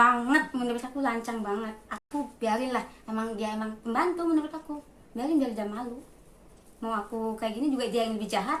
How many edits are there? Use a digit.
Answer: 0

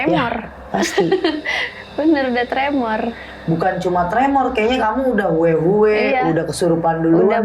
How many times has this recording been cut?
0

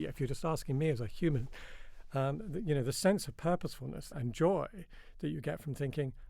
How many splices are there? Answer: 1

